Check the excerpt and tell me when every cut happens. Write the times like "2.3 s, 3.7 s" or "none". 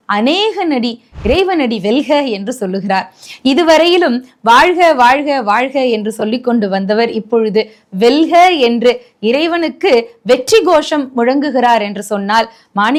none